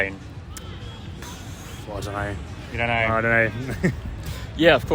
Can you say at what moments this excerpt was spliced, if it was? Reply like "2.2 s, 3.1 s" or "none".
none